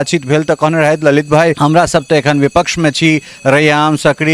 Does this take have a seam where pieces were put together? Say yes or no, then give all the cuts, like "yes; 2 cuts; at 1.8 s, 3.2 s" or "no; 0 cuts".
yes; 1 cut; at 1.6 s